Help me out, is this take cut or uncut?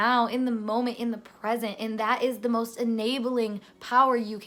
uncut